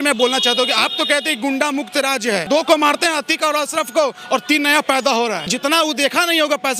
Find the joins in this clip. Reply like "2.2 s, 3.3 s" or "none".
2.4 s, 5.5 s